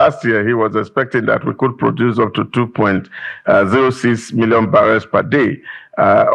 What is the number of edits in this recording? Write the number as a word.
zero